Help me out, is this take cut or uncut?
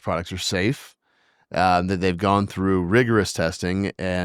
uncut